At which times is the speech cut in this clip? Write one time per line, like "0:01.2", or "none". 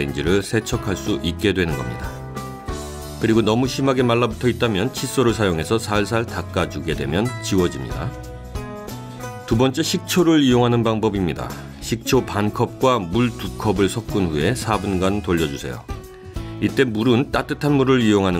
none

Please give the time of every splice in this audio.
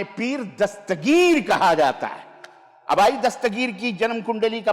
none

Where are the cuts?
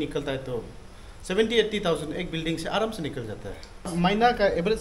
0:03.9

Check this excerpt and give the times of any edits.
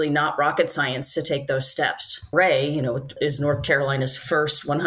0:02.3
0:03.1

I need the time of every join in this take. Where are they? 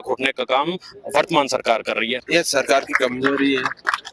0:02.2

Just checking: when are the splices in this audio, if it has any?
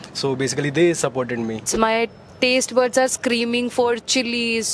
0:01.7

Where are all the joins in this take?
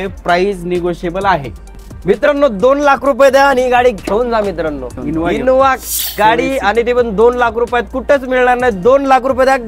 0:02.2
0:05.3

